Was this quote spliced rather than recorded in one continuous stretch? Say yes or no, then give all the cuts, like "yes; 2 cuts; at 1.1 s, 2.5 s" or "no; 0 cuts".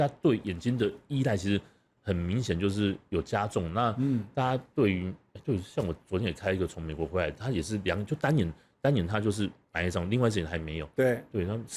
no; 0 cuts